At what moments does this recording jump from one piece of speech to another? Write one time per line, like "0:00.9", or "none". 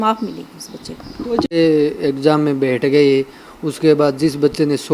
0:01.5